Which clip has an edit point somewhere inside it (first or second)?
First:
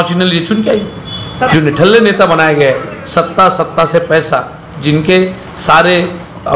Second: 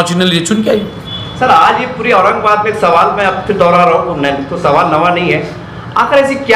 first